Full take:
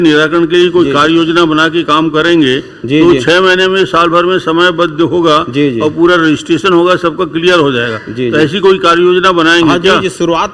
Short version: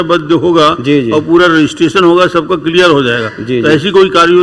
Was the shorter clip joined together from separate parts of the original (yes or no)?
no